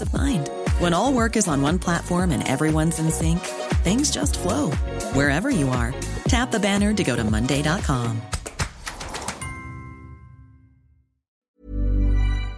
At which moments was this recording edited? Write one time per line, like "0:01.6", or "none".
0:11.5